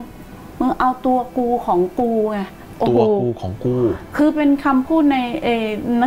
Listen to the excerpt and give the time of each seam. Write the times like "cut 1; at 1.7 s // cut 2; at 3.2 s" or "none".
none